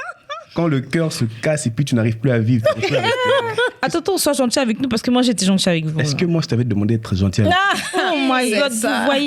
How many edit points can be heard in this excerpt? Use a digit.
1